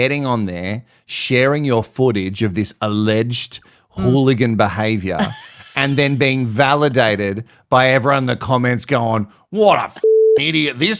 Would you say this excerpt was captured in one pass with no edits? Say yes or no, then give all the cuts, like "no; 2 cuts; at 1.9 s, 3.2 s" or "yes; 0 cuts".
yes; 0 cuts